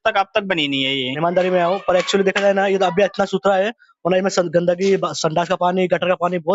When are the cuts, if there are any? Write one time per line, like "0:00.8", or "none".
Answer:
0:01.1